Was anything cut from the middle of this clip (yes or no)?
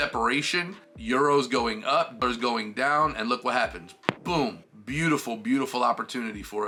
no